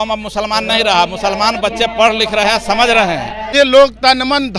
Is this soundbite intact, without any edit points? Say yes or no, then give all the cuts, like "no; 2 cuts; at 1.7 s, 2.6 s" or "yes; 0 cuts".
no; 1 cut; at 3.4 s